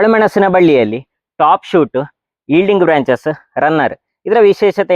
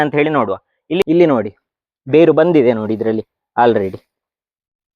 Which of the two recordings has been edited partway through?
second; 1 cut; at 1.0 s

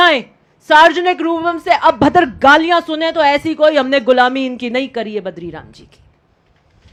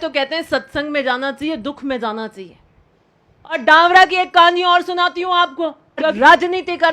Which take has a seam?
second; 2 cuts; at 3.6 s, 6.1 s

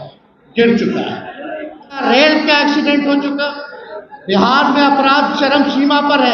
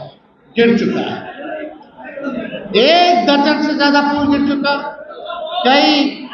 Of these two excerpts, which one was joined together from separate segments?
first; 1 cut; at 2.0 s

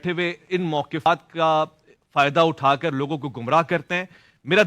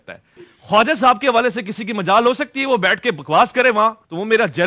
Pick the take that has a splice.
first; 1 cut; at 1.1 s

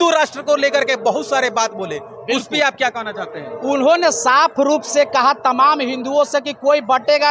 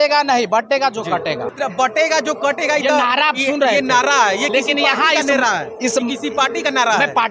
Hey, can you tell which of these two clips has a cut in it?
second; 1 cut; at 1.7 s

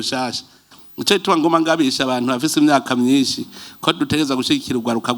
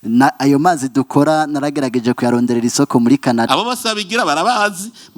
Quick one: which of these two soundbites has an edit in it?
second; 1 cut; at 3.5 s

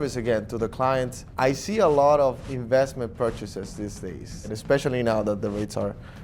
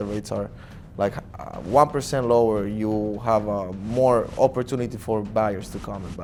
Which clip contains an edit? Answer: first; 2 cuts; at 1.2 s, 4.5 s

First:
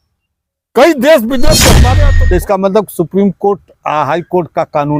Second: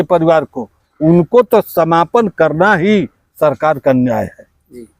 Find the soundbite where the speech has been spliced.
first; 1 cut; at 1.9 s

